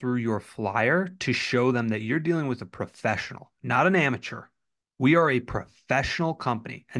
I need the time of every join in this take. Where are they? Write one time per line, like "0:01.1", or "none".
none